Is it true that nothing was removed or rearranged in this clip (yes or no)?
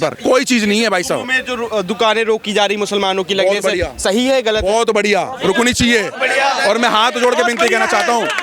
yes